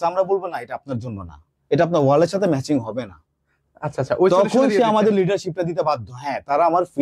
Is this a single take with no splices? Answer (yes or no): yes